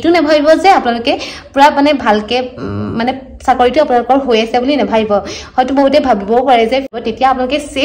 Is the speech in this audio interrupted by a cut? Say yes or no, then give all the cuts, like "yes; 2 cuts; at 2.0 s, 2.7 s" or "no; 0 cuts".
yes; 1 cut; at 7.0 s